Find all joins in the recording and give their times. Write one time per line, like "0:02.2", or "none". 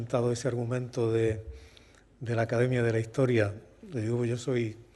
0:02.6

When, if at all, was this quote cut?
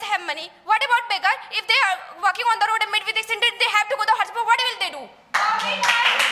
none

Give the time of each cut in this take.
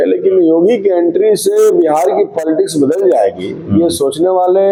none

